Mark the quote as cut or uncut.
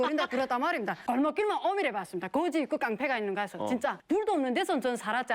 cut